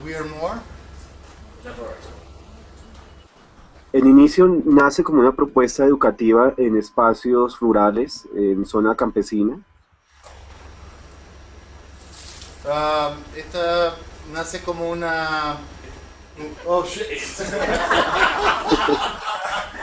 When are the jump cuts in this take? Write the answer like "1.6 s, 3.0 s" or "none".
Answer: none

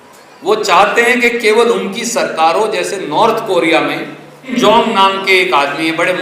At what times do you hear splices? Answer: 4.5 s

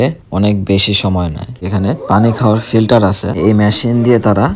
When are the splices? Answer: 1.6 s, 3.4 s

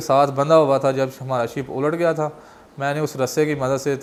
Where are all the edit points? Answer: none

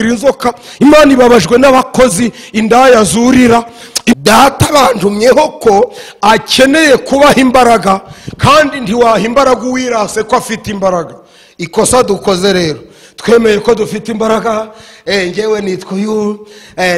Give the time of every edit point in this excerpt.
4.1 s

